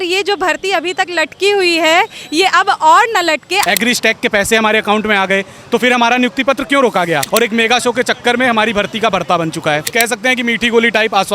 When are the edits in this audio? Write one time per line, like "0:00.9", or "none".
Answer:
0:03.6
0:07.2
0:09.8